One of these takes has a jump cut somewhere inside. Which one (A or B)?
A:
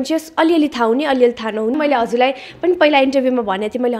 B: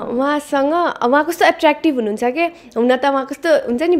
A